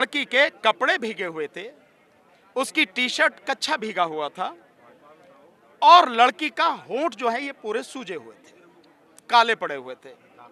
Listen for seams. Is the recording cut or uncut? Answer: uncut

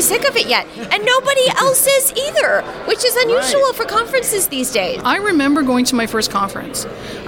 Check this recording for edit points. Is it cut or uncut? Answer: cut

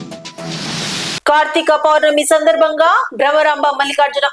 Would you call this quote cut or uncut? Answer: cut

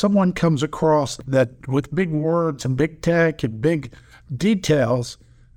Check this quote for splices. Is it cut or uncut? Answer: cut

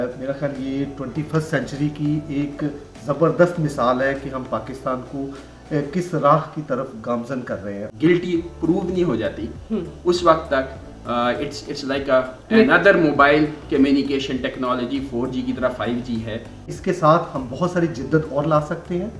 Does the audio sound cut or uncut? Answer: cut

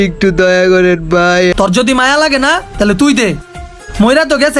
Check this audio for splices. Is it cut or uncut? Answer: cut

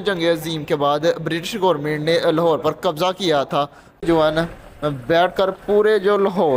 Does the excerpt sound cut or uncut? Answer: cut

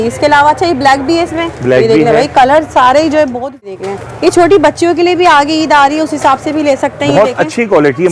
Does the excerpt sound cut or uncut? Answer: cut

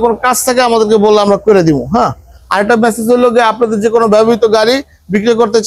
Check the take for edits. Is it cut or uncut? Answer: uncut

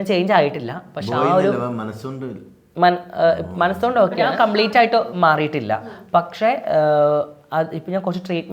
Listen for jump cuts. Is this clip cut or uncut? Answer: cut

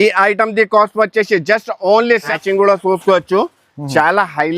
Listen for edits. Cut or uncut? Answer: cut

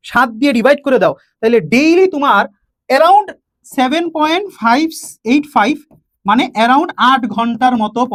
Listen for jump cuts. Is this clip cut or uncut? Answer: uncut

